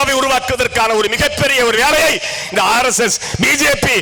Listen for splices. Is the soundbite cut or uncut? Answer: uncut